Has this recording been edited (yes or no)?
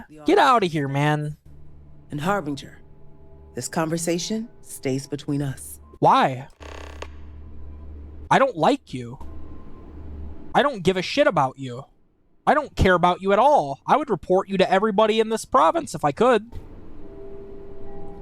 no